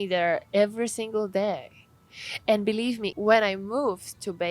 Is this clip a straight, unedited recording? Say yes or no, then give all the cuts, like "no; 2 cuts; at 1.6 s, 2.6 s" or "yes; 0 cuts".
no; 1 cut; at 3.1 s